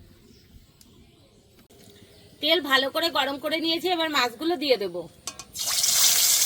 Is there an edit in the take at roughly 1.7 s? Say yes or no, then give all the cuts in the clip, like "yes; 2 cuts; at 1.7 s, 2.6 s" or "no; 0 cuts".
yes; 1 cut; at 1.7 s